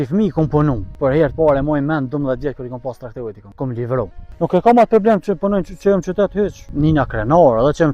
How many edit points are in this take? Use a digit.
4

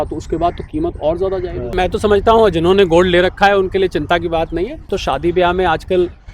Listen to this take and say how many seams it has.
2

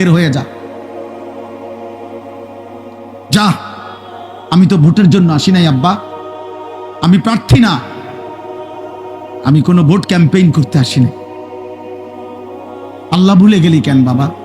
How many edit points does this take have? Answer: 4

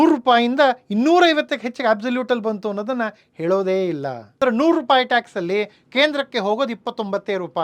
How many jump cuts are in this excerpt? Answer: 1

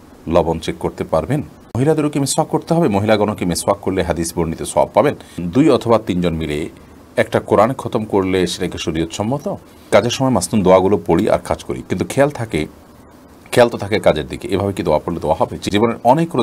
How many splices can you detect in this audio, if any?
4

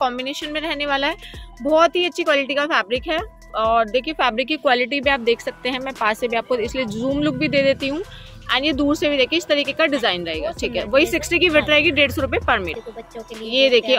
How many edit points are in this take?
0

